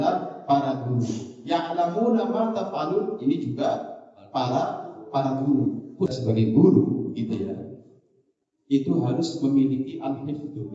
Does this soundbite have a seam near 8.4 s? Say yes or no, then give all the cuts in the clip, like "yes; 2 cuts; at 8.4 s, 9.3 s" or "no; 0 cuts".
no; 1 cut; at 6.1 s